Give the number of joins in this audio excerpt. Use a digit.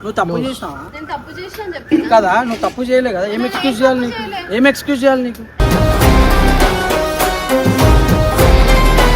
0